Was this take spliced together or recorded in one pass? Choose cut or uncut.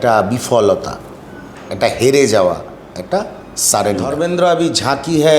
cut